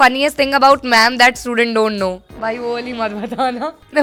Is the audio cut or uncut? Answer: uncut